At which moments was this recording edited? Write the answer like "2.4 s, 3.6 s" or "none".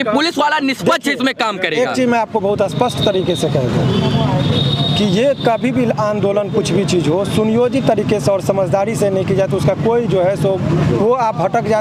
none